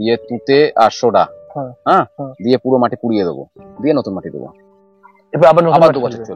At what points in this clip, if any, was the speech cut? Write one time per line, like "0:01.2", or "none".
none